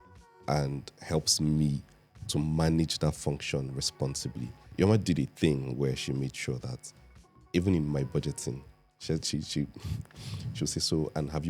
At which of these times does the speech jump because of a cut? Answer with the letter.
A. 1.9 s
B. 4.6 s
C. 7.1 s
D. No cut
B